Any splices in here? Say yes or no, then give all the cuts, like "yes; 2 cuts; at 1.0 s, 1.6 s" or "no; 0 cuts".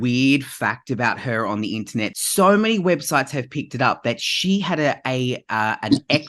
yes; 1 cut; at 2.2 s